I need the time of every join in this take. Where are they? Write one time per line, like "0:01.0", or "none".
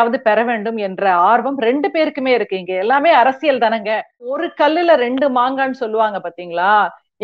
0:04.4

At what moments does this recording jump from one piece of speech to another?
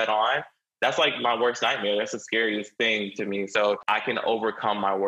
0:03.8

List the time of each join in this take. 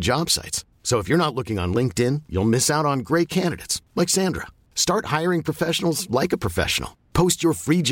none

